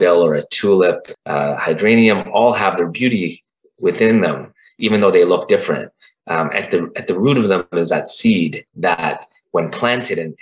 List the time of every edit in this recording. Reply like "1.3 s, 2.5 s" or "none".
1.1 s, 8.7 s